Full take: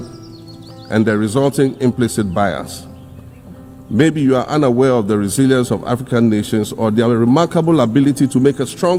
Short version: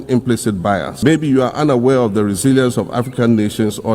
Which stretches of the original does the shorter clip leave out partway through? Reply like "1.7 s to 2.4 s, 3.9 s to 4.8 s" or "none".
2.6 s to 3.9 s

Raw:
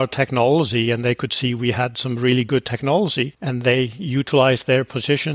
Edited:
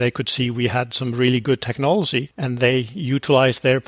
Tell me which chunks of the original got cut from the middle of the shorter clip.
none

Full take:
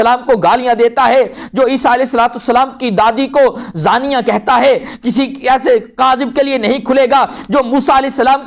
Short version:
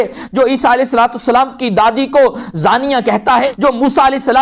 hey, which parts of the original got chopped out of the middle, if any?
4.7 s to 7.4 s

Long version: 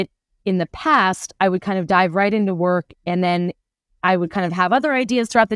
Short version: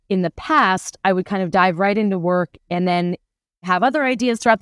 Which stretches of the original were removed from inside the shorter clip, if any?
4.0 s to 4.5 s

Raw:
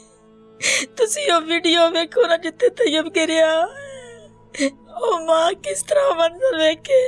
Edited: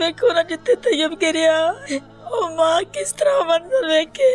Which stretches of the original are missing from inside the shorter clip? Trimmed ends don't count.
3.8 s to 4.5 s

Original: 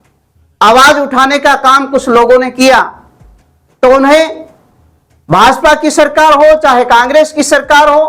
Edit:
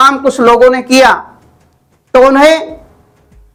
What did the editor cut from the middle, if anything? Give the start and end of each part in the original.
none

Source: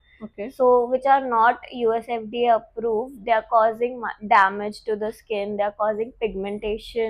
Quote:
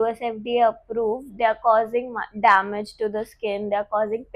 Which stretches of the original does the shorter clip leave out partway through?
none

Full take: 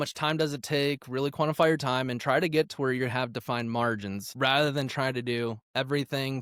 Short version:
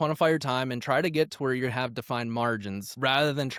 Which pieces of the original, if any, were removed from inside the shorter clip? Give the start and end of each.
none

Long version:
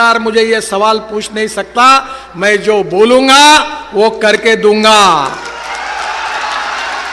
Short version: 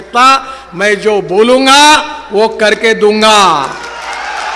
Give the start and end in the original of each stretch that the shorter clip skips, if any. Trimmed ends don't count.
none

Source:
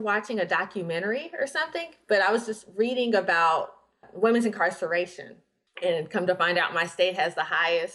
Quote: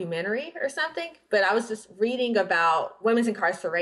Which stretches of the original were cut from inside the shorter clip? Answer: 3.7 s to 4.1 s

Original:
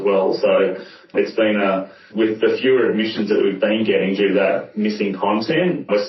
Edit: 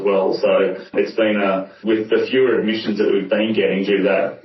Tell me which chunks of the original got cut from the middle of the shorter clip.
0.8 s to 1.0 s, 1.9 s to 2.0 s

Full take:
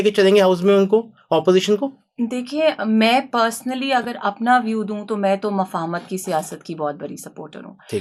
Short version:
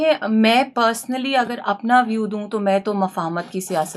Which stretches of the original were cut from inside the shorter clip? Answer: none

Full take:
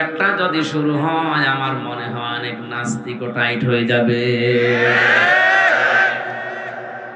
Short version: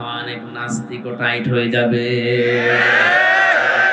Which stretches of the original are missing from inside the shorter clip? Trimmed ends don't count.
none

